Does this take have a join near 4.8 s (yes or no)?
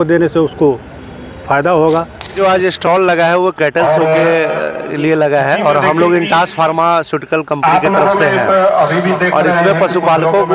no